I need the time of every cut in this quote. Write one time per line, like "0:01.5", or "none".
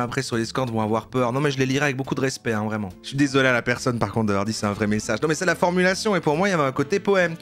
0:02.8